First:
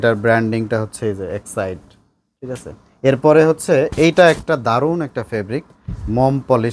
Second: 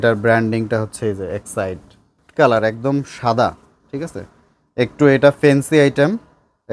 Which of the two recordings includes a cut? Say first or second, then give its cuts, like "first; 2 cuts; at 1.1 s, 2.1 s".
second; 1 cut; at 2.2 s